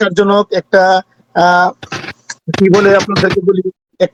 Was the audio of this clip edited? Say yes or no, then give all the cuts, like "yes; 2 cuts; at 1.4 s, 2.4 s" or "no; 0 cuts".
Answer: no; 0 cuts